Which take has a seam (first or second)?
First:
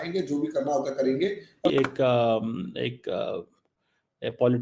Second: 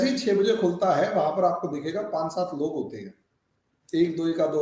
first